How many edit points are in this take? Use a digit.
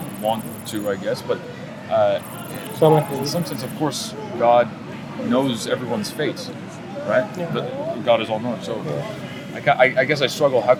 0